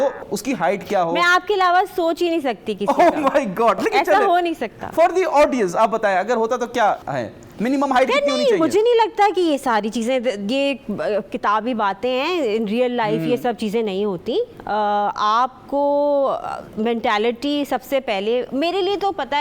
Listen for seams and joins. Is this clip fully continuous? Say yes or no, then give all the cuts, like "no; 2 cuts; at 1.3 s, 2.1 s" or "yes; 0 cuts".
yes; 0 cuts